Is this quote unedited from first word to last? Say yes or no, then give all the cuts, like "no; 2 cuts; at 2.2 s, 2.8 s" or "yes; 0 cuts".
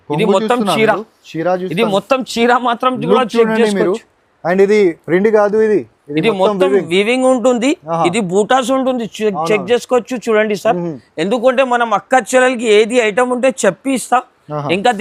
yes; 0 cuts